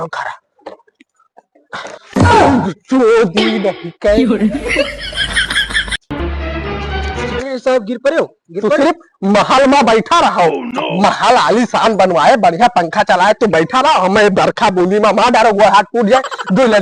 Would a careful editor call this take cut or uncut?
uncut